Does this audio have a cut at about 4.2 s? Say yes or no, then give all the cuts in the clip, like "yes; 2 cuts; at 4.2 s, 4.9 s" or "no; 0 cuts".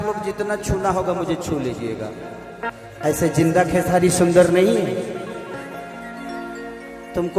no; 1 cut; at 2.7 s